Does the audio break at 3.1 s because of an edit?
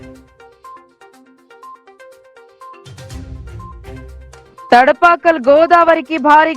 no; 2 cuts; at 1.0 s, 4.7 s

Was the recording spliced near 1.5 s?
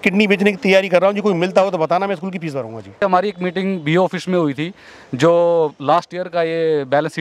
no; 1 cut; at 3.0 s

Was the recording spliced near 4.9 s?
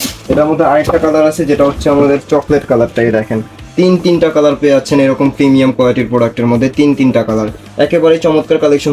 no; 0 cuts

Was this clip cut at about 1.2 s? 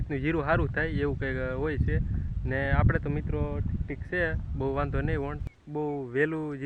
no; 0 cuts

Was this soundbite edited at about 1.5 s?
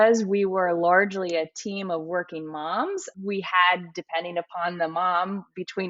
no; 1 cut; at 3.1 s

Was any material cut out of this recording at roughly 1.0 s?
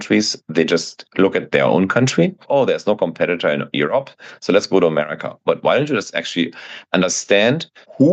no; 1 cut; at 2.4 s

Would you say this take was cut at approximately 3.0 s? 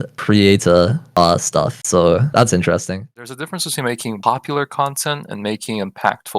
yes; 1 cut; at 3.0 s

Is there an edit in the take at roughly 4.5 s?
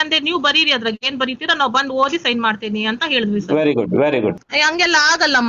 yes; 1 cut; at 4.5 s

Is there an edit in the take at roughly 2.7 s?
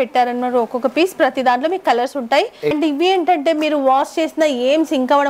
yes; 1 cut; at 2.7 s

